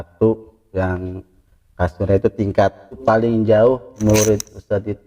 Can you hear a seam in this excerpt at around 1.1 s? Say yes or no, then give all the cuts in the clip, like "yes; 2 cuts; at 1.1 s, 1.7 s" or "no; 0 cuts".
no; 2 cuts; at 3.0 s, 4.0 s